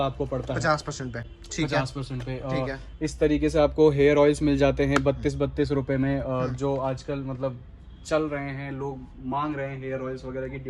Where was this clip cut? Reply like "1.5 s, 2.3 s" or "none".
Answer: none